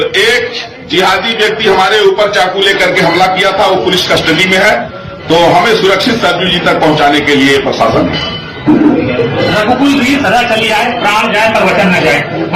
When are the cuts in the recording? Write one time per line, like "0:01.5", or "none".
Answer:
none